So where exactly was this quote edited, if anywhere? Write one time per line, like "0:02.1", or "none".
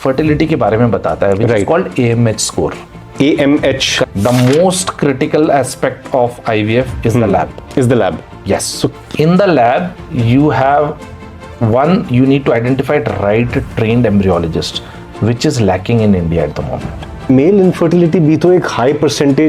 0:04.0
0:08.9
0:17.3